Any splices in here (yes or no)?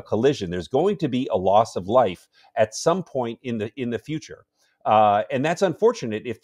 no